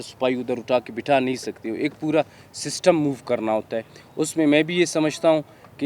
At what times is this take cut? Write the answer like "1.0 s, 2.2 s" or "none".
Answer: none

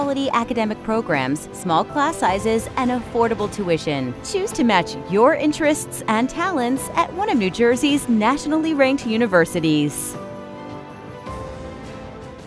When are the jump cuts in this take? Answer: 9.9 s

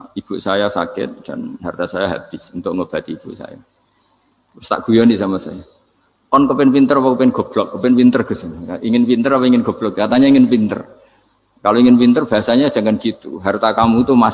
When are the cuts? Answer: none

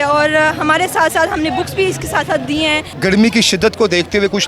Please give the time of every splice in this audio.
3.0 s

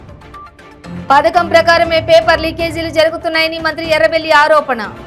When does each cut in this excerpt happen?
none

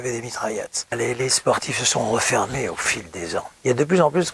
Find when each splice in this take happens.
0.9 s, 3.5 s

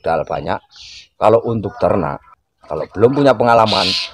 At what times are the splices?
2.2 s

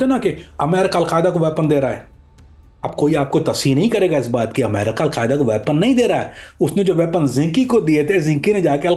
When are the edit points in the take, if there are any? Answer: none

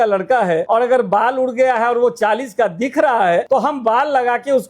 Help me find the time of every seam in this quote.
3.5 s

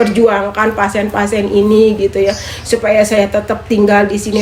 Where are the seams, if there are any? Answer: none

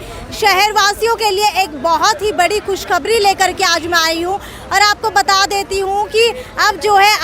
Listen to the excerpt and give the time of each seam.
none

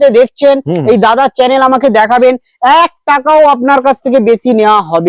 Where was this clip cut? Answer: none

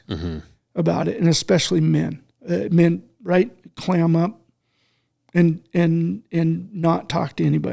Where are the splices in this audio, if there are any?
2.3 s

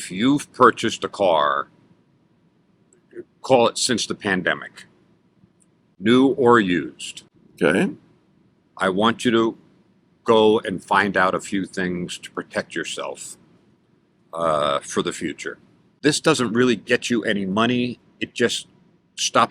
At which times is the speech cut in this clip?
16.0 s

